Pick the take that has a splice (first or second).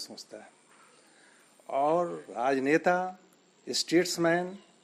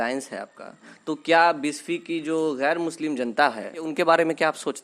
second